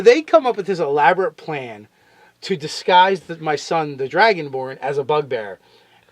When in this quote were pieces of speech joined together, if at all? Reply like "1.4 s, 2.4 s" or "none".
3.9 s